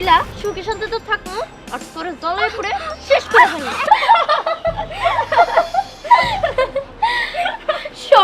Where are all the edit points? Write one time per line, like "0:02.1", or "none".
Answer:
0:03.8